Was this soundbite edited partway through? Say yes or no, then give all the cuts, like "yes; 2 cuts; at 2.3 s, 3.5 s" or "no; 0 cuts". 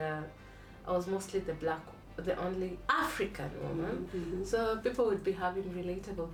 no; 0 cuts